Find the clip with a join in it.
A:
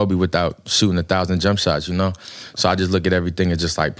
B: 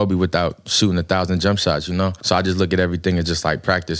B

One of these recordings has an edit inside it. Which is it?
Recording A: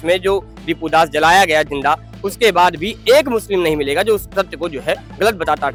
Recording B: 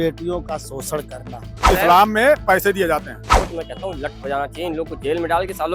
B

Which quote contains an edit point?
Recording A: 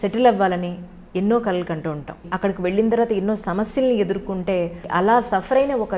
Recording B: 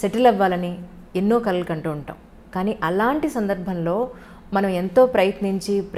A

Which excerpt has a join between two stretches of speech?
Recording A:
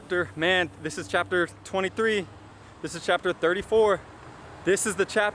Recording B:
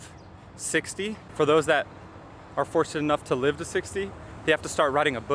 B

